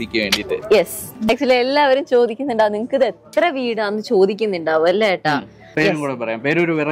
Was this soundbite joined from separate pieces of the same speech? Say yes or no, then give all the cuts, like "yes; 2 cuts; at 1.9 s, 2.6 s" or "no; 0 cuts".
yes; 2 cuts; at 1.3 s, 5.7 s